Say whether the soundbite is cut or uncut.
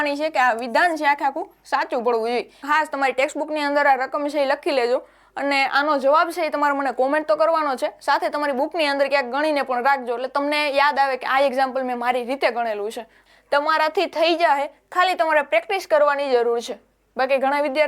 cut